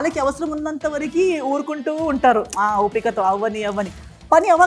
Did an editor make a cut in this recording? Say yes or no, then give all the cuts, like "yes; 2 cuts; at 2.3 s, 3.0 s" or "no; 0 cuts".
no; 0 cuts